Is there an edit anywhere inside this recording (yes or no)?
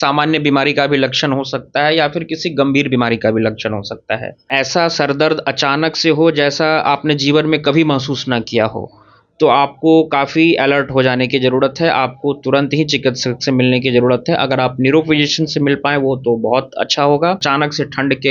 yes